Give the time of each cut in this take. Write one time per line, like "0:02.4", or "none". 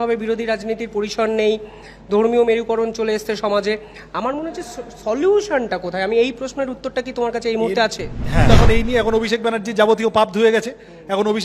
0:08.5